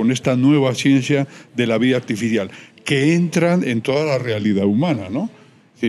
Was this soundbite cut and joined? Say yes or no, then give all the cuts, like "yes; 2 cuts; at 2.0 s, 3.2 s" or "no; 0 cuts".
no; 0 cuts